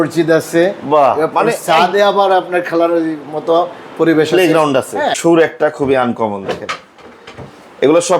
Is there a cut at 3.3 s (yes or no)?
no